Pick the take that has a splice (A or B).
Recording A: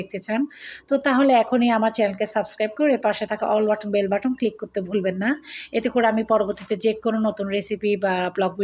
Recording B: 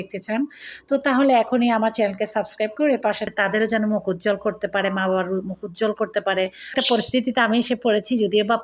B